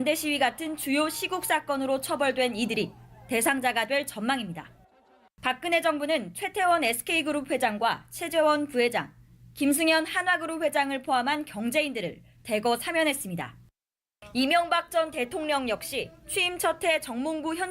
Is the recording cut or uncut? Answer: cut